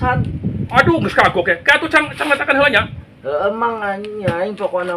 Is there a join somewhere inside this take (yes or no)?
no